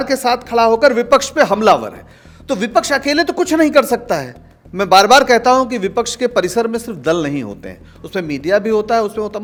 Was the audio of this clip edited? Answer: no; 0 cuts

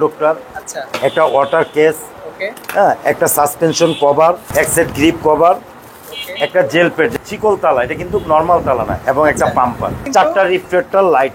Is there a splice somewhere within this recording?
yes; 3 cuts; at 4.4 s, 7.1 s, 10.1 s

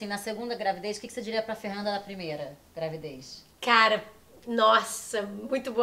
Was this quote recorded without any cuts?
yes; 0 cuts

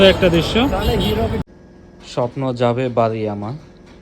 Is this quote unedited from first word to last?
no; 1 cut; at 1.4 s

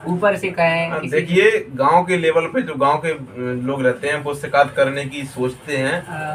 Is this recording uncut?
yes; 0 cuts

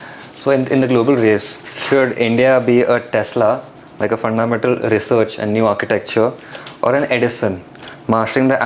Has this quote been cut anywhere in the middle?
no; 0 cuts

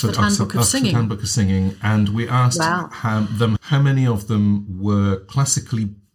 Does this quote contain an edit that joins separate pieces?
yes; 1 cut; at 3.6 s

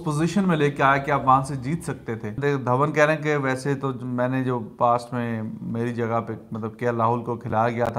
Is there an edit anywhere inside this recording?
yes; 1 cut; at 2.3 s

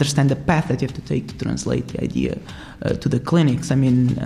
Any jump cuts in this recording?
no; 0 cuts

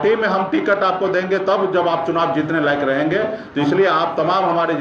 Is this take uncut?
yes; 0 cuts

